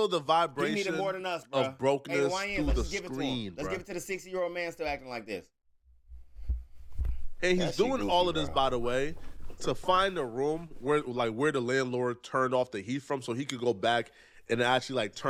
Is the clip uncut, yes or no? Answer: yes